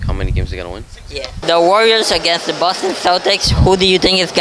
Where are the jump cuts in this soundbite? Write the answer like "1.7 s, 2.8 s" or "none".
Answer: 1.4 s

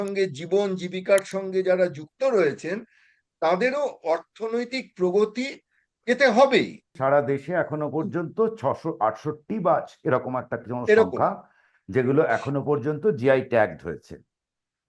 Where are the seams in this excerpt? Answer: 6.9 s

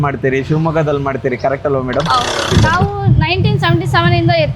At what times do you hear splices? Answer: 2.5 s

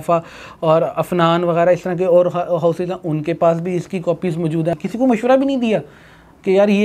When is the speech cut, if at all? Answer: 4.7 s

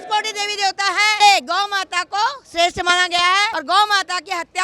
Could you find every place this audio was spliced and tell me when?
1.2 s, 3.6 s

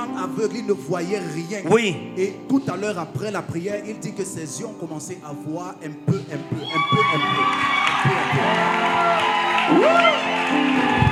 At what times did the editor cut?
none

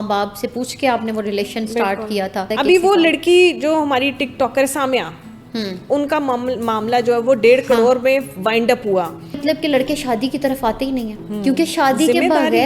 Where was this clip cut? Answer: 2.5 s, 9.4 s

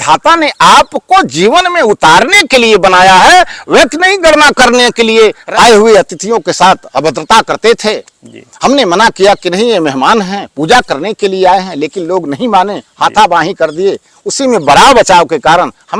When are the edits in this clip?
5.4 s

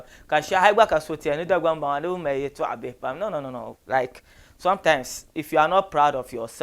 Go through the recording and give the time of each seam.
none

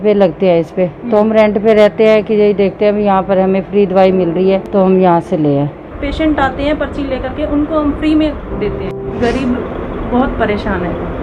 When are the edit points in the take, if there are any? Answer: 4.7 s, 5.9 s, 8.9 s

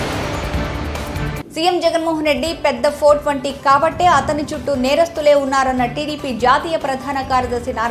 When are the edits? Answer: 1.1 s

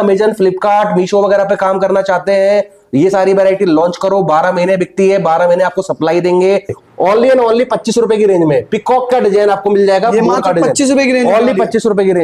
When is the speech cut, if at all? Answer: 6.8 s

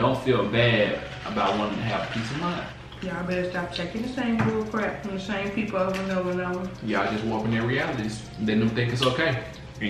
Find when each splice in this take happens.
2.8 s

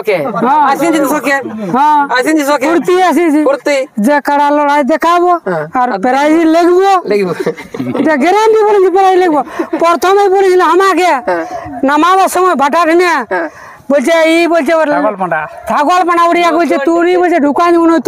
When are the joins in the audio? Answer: none

